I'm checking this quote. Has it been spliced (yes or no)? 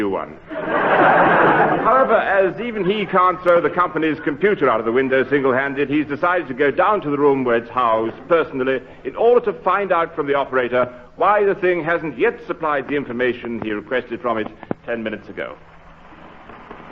yes